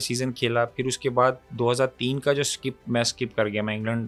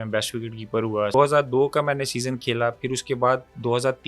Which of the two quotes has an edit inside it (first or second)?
second